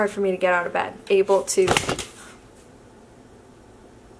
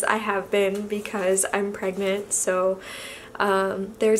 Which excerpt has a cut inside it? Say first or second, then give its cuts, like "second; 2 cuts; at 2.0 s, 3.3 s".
first; 1 cut; at 0.9 s